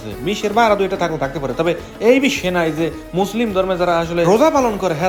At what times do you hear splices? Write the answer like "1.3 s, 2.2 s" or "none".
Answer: none